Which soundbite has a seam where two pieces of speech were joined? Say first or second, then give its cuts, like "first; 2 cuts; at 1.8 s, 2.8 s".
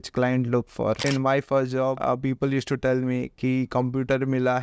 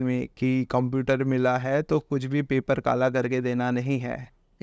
first; 2 cuts; at 1.0 s, 2.0 s